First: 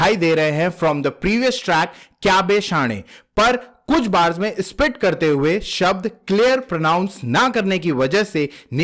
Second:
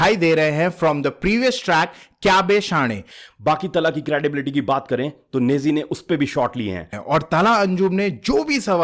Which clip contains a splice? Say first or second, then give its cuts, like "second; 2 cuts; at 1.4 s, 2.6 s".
second; 2 cuts; at 3.2 s, 7.0 s